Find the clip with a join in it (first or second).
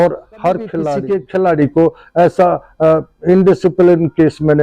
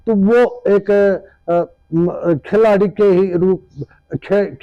first